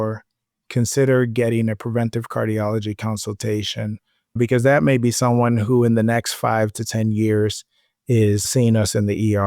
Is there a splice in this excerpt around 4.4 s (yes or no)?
yes